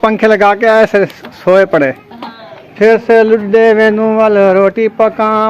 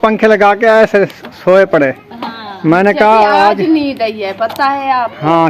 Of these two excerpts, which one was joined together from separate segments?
first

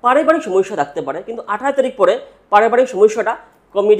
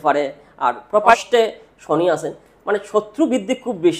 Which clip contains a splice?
second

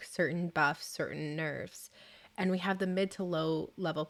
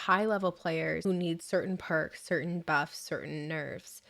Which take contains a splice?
second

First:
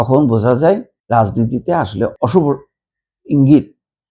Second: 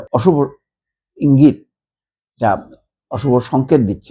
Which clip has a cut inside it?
first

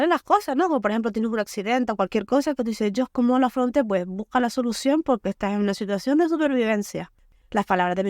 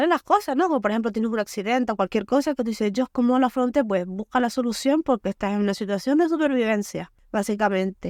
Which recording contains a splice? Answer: first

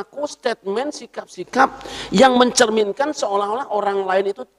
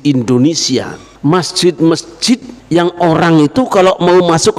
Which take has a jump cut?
second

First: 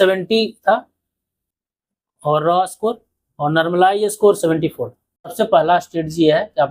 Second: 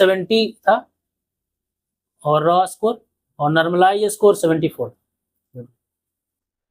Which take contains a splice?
first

